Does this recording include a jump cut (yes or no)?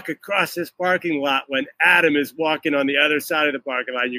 no